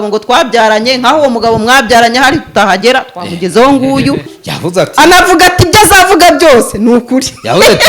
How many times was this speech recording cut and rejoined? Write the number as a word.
one